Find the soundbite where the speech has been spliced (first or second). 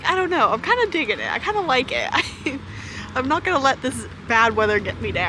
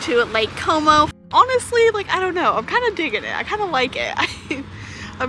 second